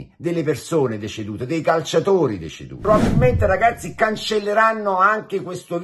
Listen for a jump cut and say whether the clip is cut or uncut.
cut